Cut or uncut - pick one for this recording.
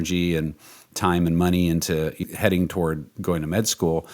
cut